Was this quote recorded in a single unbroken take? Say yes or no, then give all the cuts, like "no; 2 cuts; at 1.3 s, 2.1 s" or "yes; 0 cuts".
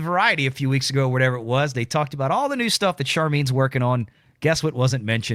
yes; 0 cuts